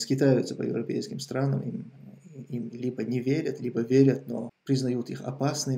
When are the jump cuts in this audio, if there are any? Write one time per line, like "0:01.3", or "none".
0:04.5